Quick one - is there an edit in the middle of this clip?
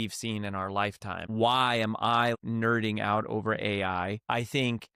yes; 3 cuts; at 1.2 s, 2.4 s, 4.2 s

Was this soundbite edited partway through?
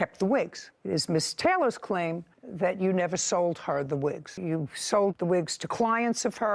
yes; 1 cut; at 4.3 s

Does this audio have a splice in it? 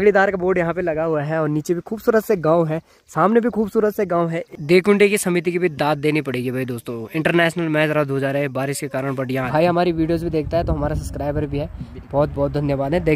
yes; 2 cuts; at 4.4 s, 9.5 s

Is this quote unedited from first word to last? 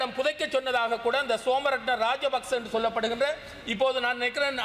yes; 0 cuts

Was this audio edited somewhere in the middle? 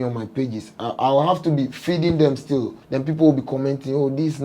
yes; 1 cut; at 2.8 s

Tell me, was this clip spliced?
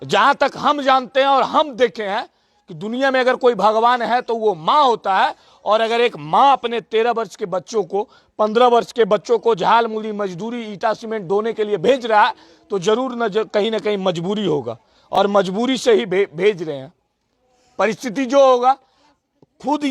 no; 0 cuts

